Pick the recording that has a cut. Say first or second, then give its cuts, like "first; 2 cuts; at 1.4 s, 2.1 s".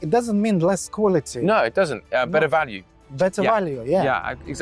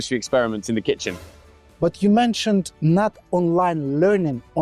second; 1 cut; at 1.4 s